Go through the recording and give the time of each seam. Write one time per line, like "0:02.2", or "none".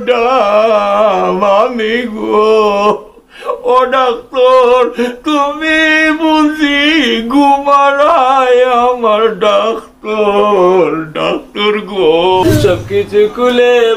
0:12.4